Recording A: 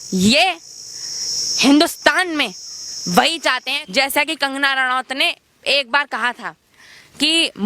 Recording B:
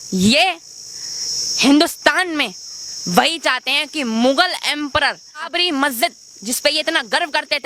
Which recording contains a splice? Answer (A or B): A